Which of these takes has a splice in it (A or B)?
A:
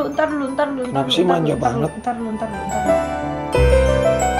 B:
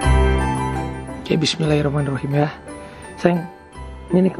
B